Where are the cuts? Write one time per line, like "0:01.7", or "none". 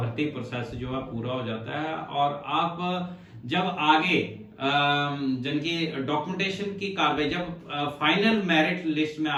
none